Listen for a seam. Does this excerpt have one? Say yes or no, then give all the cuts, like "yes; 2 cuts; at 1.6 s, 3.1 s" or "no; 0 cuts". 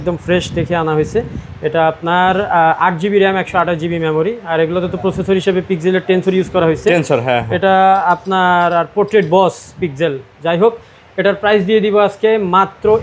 no; 0 cuts